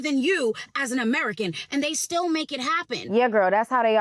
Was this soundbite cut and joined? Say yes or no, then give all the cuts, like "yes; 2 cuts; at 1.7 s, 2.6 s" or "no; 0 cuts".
yes; 1 cut; at 3.0 s